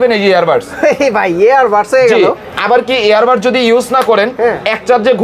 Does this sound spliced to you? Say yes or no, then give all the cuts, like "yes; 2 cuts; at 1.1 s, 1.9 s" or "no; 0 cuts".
yes; 1 cut; at 2.5 s